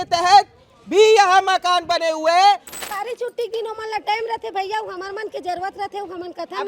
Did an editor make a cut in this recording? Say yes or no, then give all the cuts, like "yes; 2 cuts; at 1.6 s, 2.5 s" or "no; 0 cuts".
yes; 1 cut; at 2.7 s